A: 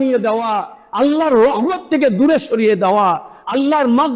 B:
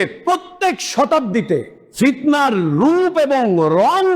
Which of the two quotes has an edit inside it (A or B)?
B